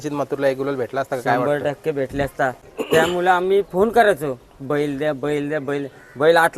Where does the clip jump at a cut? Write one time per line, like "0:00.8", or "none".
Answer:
0:02.7